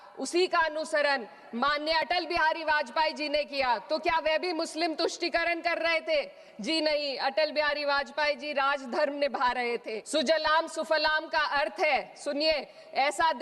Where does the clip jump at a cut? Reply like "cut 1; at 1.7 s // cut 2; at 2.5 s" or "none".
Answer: cut 1; at 10.0 s

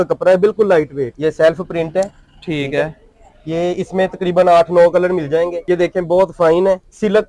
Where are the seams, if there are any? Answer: cut 1; at 1.1 s // cut 2; at 5.6 s

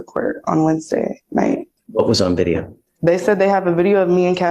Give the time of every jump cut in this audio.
cut 1; at 1.8 s

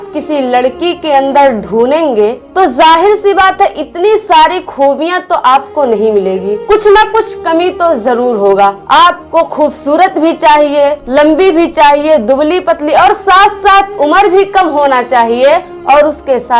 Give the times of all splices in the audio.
none

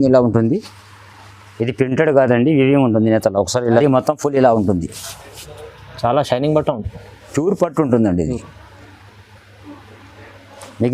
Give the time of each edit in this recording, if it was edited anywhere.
cut 1; at 3.6 s

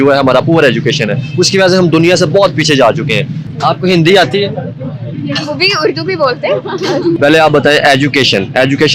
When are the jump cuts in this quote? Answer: cut 1; at 3.4 s // cut 2; at 7.2 s

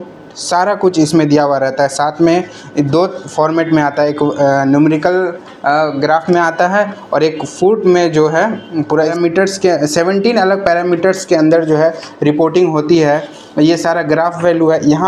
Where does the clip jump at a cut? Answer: cut 1; at 9.1 s

